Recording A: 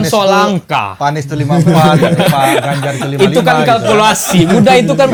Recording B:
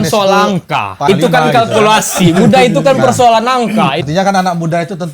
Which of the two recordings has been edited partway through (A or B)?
B